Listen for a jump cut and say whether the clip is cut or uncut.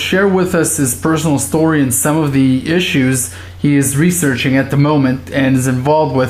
cut